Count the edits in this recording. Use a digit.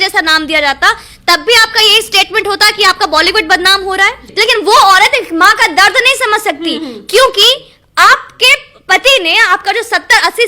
1